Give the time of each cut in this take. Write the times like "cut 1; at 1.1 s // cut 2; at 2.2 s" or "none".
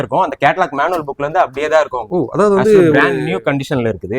cut 1; at 2.0 s